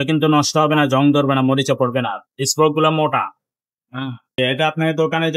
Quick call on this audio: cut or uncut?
cut